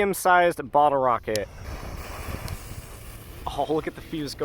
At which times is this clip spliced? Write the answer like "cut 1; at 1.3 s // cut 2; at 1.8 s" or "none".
cut 1; at 1.6 s